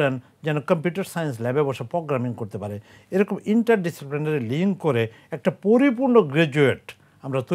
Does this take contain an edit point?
no; 0 cuts

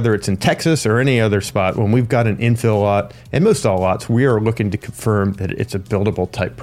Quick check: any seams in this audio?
no; 0 cuts

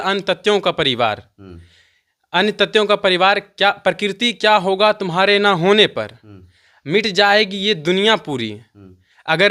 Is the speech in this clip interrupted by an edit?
no; 0 cuts

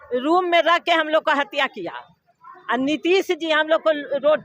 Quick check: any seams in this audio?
no; 0 cuts

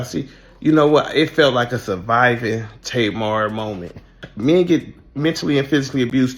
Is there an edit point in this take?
yes; 1 cut; at 4.2 s

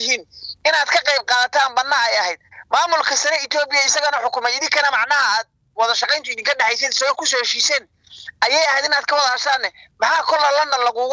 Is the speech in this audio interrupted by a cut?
no; 0 cuts

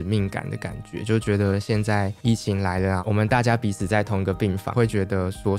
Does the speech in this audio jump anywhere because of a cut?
no; 0 cuts

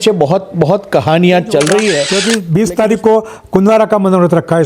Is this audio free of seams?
no; 1 cut; at 2.1 s

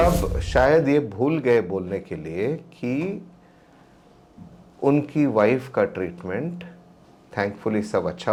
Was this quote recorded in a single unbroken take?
yes; 0 cuts

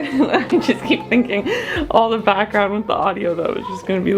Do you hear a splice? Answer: no; 0 cuts

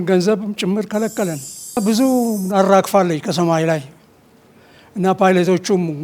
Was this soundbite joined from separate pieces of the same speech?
yes; 1 cut; at 1.8 s

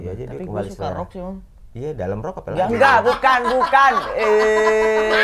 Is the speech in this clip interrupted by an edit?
no; 0 cuts

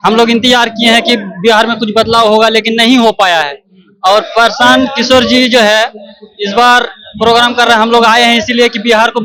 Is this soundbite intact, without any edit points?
yes; 0 cuts

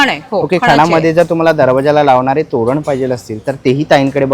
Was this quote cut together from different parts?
no; 0 cuts

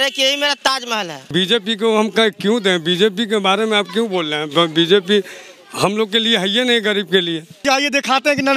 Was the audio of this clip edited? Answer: yes; 2 cuts; at 1.2 s, 7.5 s

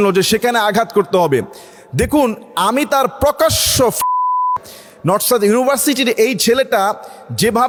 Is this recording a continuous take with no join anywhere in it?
yes; 0 cuts

